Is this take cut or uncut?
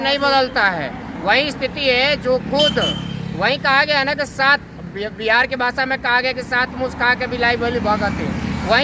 uncut